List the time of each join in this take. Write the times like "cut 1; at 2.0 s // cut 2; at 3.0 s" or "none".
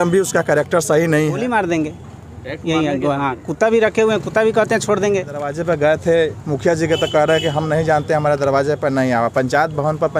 cut 1; at 1.4 s // cut 2; at 5.5 s